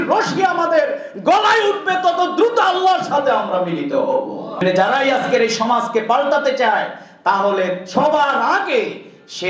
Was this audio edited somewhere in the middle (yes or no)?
yes